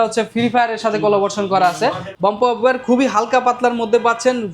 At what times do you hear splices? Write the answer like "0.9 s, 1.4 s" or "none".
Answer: 2.1 s